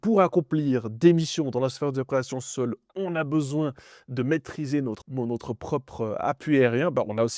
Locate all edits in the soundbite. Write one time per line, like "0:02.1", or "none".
0:05.0